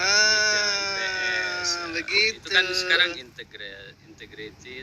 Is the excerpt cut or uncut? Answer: uncut